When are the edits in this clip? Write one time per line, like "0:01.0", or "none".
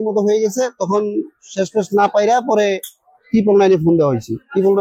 none